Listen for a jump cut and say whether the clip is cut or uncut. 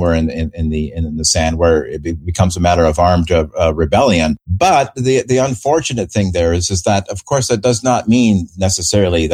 cut